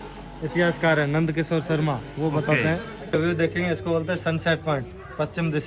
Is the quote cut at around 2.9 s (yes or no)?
yes